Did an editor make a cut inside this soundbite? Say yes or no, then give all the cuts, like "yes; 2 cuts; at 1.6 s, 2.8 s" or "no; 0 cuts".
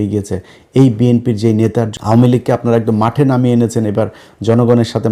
yes; 1 cut; at 1.9 s